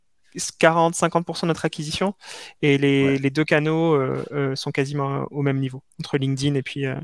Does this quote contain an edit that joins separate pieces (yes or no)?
no